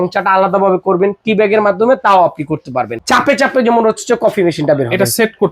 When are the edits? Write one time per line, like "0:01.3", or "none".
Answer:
0:03.0